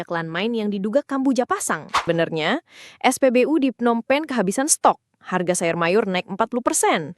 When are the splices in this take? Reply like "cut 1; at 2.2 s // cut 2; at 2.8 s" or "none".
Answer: cut 1; at 2.0 s